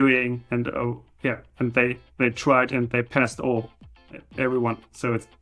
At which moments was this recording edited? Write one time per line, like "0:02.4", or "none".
0:04.3